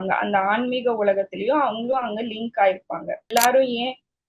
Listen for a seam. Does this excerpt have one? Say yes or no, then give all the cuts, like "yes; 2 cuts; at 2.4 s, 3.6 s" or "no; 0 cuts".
yes; 1 cut; at 3.3 s